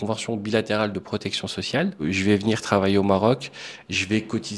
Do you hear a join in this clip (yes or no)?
yes